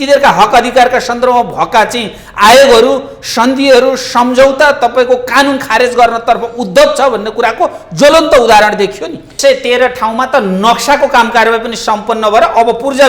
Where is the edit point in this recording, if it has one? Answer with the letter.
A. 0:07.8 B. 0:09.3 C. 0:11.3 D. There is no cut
B